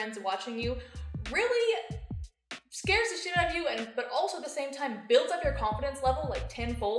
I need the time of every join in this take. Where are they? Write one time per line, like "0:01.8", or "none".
none